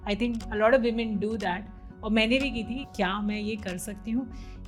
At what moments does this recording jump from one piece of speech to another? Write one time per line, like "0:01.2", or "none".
0:02.8